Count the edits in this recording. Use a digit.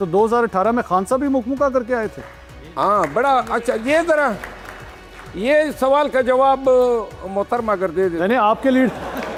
0